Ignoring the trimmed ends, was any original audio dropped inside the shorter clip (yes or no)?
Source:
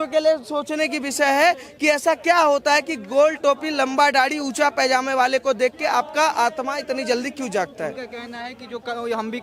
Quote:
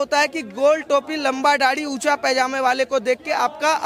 no